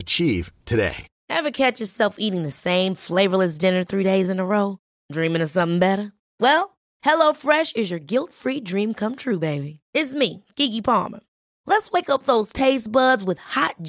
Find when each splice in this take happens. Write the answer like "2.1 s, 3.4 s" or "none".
1.1 s